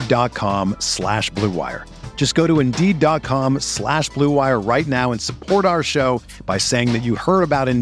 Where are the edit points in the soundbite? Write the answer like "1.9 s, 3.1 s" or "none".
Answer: none